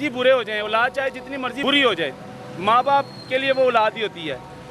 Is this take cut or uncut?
cut